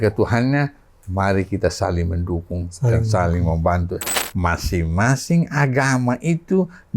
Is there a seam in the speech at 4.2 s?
yes; 1 cut; at 4.2 s

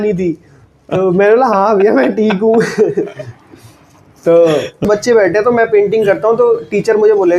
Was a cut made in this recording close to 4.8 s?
yes; 1 cut; at 4.8 s

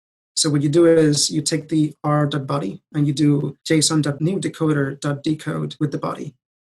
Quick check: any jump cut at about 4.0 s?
yes; 2 cuts; at 4.0 s, 5.7 s

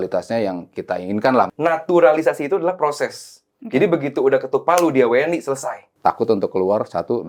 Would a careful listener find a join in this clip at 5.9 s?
yes; 2 cuts; at 1.5 s, 5.9 s

